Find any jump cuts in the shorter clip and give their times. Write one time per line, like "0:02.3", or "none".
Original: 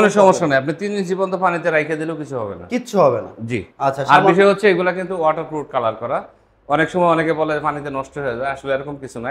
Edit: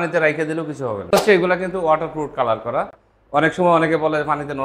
0:01.1